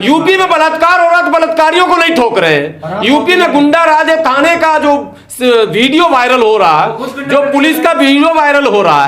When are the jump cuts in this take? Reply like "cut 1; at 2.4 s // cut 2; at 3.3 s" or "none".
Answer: none